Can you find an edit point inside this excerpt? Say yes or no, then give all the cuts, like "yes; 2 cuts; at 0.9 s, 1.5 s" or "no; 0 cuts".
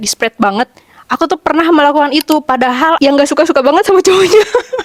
no; 0 cuts